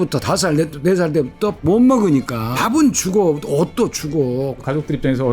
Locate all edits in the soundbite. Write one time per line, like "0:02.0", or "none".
0:01.6
0:02.5
0:04.6